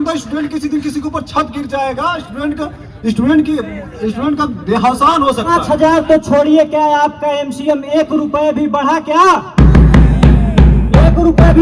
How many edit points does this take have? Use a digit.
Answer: 1